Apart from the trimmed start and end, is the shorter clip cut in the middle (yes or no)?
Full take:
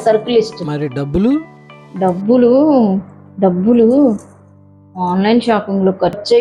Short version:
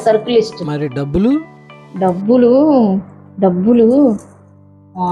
no